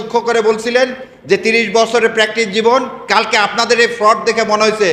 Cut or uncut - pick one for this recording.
uncut